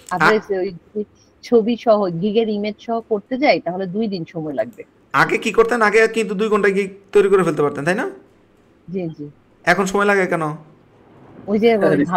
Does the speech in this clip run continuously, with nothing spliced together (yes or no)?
yes